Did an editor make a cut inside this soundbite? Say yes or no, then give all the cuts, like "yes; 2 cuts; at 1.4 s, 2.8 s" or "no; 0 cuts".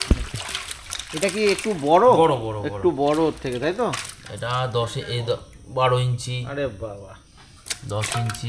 no; 0 cuts